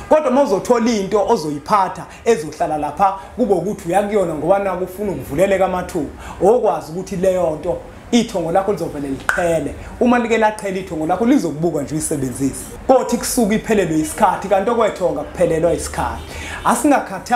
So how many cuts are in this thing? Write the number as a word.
one